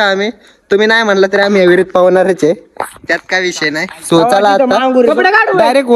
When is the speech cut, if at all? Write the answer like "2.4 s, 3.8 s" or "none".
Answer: none